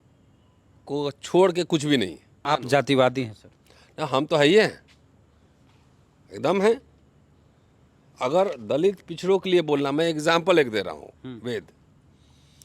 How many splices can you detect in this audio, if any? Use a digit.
1